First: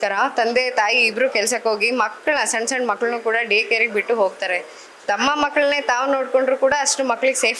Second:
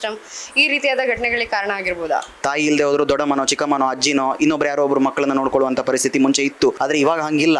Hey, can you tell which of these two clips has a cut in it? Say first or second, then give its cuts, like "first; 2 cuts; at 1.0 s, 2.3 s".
second; 1 cut; at 2.4 s